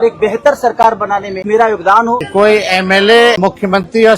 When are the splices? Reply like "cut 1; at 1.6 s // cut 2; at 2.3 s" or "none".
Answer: cut 1; at 1.4 s // cut 2; at 2.3 s // cut 3; at 3.4 s